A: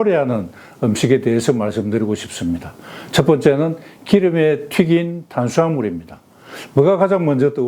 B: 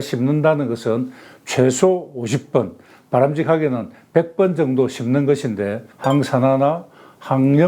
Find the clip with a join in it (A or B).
B